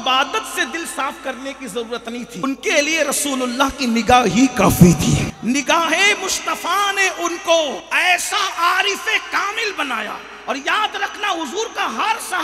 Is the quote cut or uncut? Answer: cut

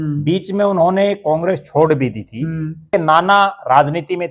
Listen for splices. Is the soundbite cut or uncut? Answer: cut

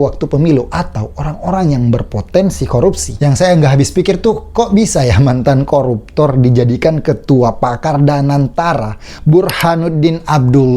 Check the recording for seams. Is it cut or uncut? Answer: cut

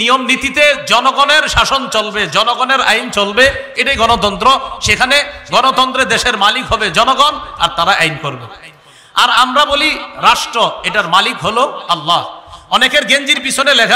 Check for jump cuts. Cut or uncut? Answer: uncut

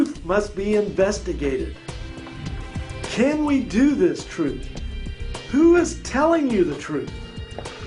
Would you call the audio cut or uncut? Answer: cut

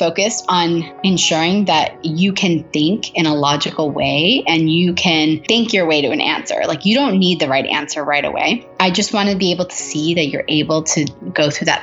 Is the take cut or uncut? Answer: cut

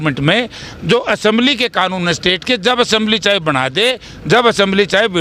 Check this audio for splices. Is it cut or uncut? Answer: uncut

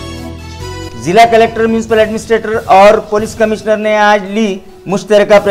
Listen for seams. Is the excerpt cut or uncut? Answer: cut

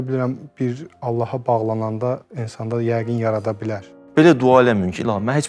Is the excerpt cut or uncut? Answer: cut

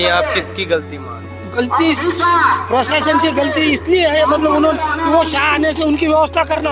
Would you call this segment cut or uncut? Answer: uncut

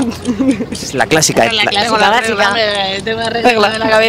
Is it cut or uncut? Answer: uncut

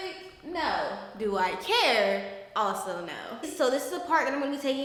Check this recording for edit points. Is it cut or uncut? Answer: uncut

